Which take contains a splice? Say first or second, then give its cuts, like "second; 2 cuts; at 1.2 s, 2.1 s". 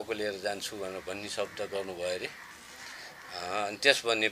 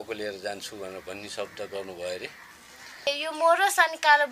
second; 1 cut; at 3.1 s